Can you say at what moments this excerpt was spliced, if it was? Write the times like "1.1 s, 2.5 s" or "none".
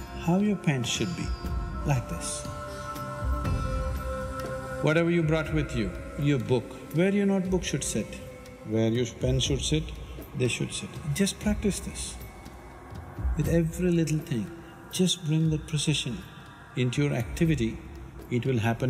none